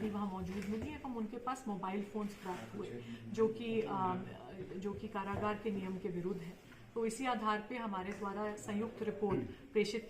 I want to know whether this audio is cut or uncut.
uncut